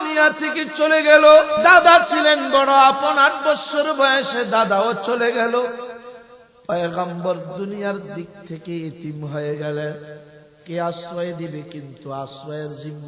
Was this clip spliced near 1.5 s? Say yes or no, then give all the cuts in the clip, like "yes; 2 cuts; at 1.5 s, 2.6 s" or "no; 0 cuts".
yes; 1 cut; at 1.5 s